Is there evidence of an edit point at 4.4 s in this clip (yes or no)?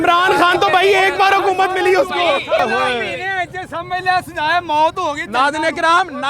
no